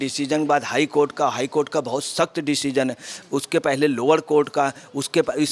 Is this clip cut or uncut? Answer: uncut